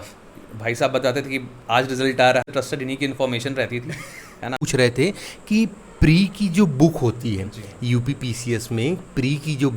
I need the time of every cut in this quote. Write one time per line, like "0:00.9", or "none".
0:02.4
0:04.6